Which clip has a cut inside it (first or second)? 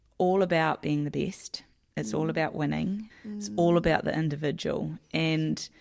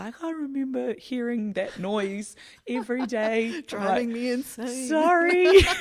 first